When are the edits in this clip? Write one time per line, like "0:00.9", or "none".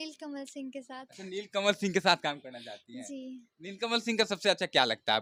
none

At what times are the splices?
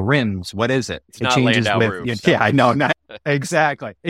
0:01.0
0:02.2
0:03.0

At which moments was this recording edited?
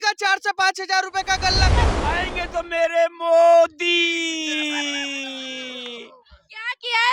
0:01.9

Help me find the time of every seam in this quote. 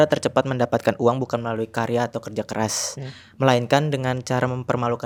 none

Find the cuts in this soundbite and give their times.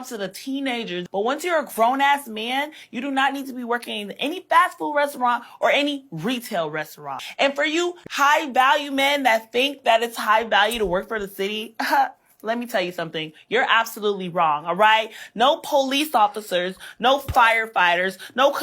0:01.0
0:07.2
0:08.0

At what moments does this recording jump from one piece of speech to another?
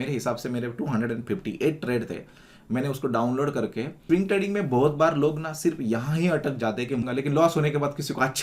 0:04.0
0:07.1

